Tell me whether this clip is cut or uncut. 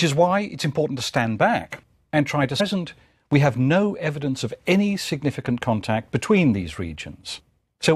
uncut